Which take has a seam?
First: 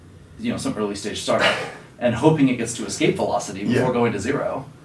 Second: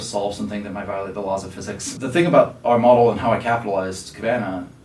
second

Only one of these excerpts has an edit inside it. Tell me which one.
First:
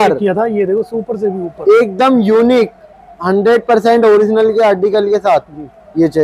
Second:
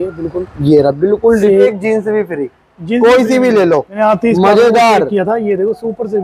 second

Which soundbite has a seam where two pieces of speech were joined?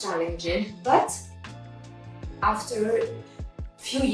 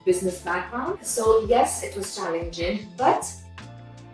second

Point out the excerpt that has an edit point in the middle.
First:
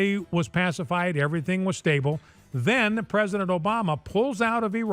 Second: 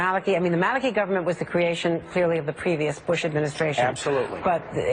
first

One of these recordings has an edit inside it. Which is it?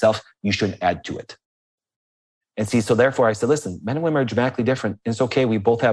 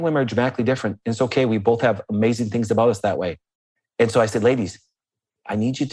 first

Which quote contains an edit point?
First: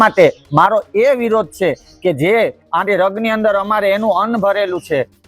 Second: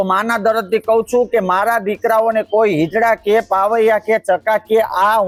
first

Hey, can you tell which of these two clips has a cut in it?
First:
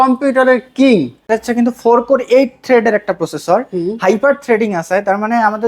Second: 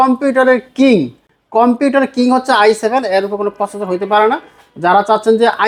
first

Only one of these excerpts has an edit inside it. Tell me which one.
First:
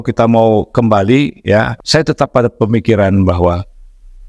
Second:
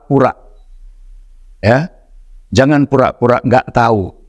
first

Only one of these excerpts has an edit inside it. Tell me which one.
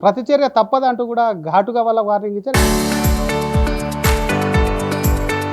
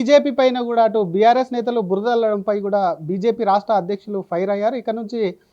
first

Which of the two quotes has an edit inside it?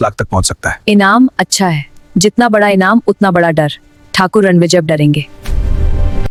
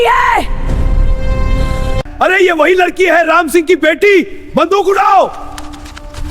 second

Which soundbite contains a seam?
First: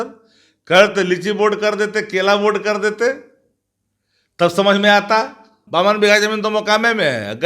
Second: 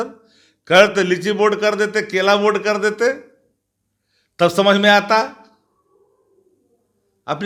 first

